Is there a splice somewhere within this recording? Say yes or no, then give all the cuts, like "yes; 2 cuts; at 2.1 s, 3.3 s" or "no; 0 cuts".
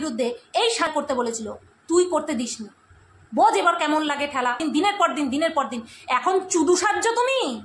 yes; 2 cuts; at 0.9 s, 4.6 s